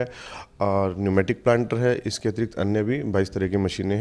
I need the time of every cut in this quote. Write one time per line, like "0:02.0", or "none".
none